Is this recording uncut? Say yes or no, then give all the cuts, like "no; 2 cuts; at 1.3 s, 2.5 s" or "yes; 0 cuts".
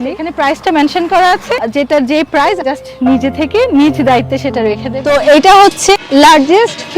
no; 1 cut; at 4.9 s